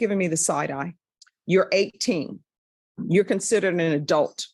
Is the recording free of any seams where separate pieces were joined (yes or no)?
no